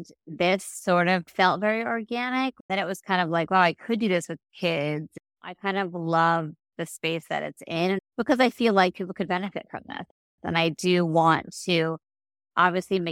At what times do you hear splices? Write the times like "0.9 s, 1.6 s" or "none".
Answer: 2.7 s